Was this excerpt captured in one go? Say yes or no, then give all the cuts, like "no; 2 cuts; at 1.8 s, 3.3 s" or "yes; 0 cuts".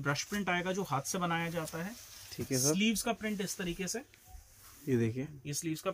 yes; 0 cuts